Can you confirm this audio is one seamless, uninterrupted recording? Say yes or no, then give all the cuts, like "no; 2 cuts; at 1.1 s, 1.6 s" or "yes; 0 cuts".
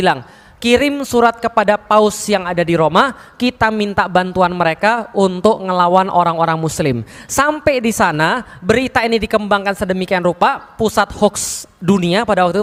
yes; 0 cuts